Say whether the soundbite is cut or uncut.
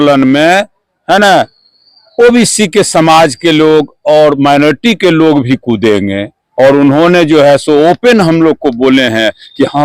uncut